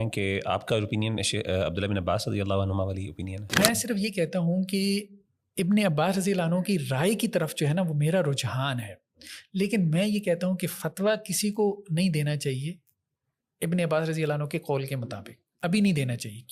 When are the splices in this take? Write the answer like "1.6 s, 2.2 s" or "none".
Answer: 3.4 s